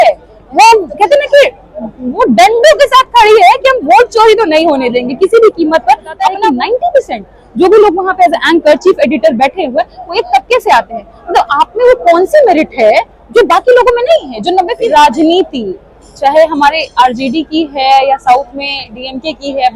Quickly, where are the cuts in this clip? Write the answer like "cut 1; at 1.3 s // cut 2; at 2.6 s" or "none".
cut 1; at 6.4 s // cut 2; at 14.8 s